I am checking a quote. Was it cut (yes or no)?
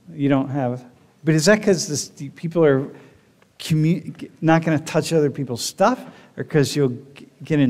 no